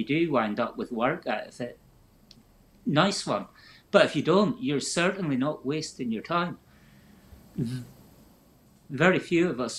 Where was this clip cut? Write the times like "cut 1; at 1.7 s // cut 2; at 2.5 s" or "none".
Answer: cut 1; at 8.9 s